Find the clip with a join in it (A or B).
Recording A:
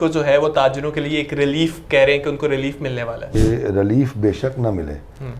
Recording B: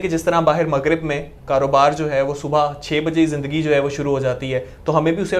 A